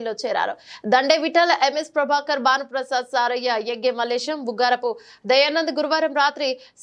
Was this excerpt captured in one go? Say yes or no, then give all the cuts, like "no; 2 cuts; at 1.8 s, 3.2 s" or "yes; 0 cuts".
yes; 0 cuts